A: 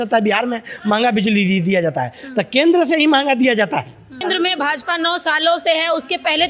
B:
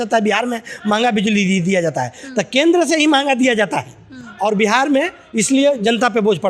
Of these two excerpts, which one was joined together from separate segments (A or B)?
A